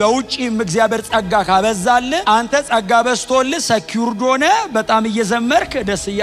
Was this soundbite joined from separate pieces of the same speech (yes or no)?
no